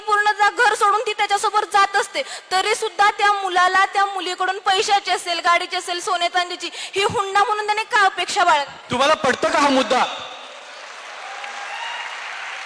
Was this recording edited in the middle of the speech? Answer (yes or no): no